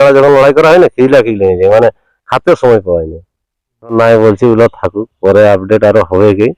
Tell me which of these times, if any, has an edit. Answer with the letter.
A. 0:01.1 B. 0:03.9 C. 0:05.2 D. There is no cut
B